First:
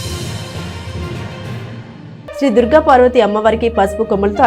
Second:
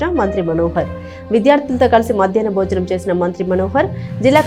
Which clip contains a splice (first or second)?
first